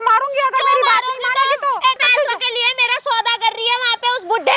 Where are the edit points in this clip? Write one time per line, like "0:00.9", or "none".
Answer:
0:02.0